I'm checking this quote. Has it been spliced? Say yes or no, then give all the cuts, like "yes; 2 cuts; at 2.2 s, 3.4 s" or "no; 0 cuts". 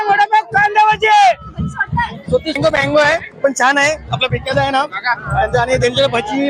yes; 1 cut; at 2.6 s